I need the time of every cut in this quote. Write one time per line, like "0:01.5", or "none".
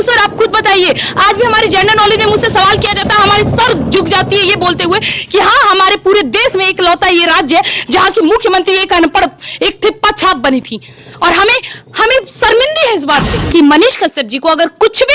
0:13.4